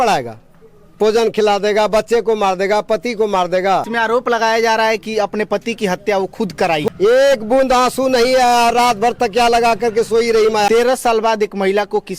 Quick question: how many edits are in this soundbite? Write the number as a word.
three